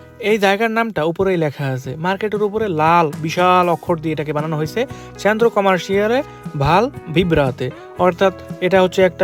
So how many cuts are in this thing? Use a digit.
0